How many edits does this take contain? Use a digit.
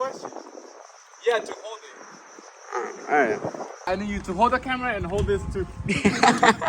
1